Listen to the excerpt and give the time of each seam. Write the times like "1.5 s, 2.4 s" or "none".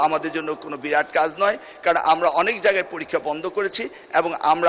none